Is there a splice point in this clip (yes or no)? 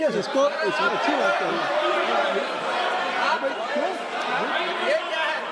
no